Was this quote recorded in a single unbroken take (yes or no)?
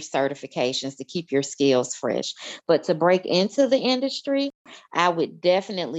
yes